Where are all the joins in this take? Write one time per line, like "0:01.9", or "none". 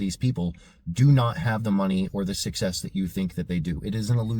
none